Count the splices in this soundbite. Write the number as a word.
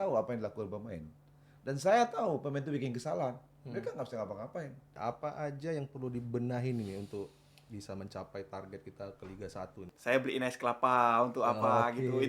two